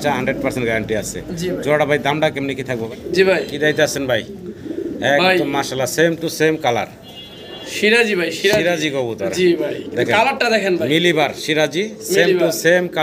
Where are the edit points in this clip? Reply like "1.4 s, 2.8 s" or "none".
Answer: 2.8 s